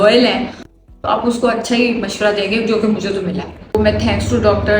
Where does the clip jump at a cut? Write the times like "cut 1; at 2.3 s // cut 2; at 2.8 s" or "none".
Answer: cut 1; at 3.8 s